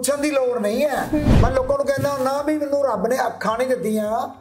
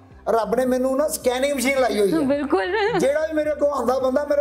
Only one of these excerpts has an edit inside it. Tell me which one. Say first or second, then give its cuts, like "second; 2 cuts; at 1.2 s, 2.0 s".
first; 1 cut; at 1.3 s